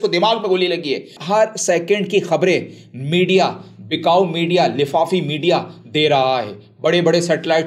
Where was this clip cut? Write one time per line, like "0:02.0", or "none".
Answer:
0:01.1